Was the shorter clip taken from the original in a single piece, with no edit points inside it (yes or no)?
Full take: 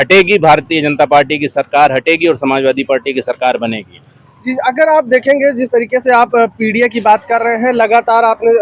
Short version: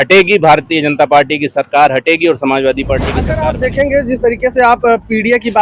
no